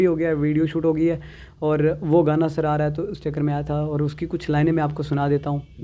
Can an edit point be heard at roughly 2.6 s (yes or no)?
no